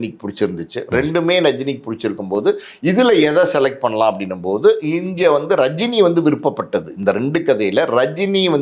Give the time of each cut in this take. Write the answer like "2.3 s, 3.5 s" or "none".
none

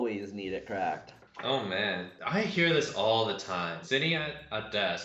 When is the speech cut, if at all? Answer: 2.1 s, 3.8 s

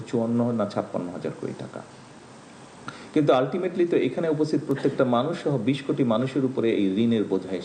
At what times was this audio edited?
none

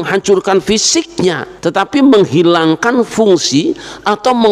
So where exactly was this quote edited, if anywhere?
1.5 s

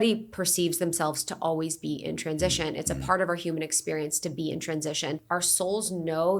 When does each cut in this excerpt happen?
5.2 s

